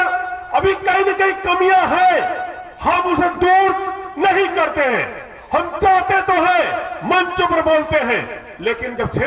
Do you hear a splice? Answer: no; 0 cuts

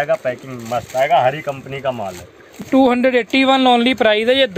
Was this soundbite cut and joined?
no; 0 cuts

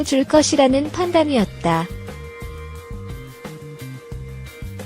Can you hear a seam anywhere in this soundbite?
yes; 1 cut; at 1.9 s

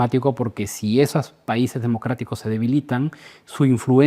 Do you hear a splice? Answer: no; 0 cuts

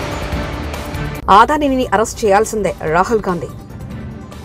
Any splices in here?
yes; 1 cut; at 1.2 s

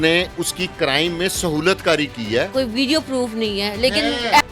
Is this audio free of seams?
no; 1 cut; at 2.5 s

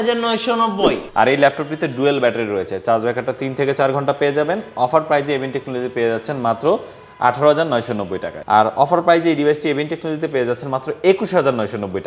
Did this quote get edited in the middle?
yes; 2 cuts; at 1.0 s, 8.3 s

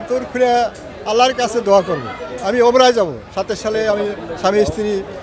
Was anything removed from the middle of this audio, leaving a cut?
no; 0 cuts

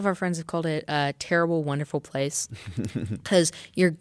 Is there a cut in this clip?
no; 0 cuts

